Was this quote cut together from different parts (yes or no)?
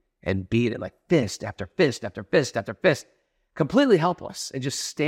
no